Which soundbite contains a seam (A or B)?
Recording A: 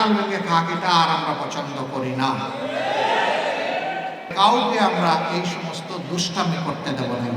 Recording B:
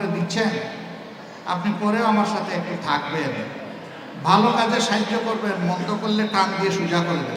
A